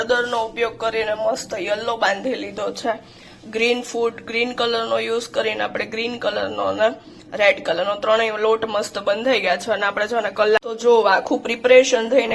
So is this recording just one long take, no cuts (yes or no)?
no